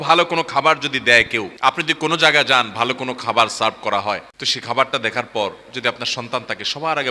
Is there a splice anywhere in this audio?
yes; 2 cuts; at 1.6 s, 4.9 s

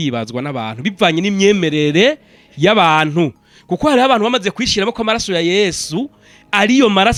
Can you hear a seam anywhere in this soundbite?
no; 0 cuts

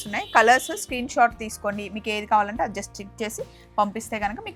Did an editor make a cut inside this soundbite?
no; 0 cuts

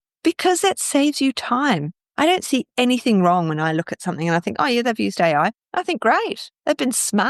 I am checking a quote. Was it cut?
yes; 1 cut; at 5.6 s

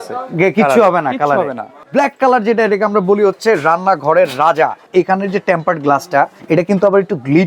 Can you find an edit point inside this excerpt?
yes; 3 cuts; at 1.8 s, 4.9 s, 6.4 s

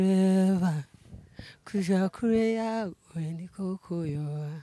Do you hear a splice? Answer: no; 0 cuts

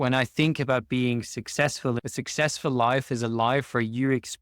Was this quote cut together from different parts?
yes; 1 cut; at 2.0 s

